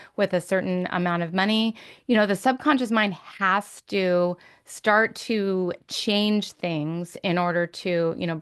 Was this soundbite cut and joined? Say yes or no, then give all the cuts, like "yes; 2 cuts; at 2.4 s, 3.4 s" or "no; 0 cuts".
no; 0 cuts